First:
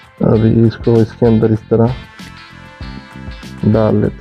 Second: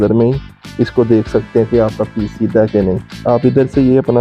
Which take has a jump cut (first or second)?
second